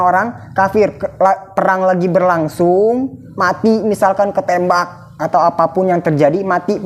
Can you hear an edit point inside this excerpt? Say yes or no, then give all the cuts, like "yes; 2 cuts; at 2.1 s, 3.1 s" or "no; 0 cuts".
no; 0 cuts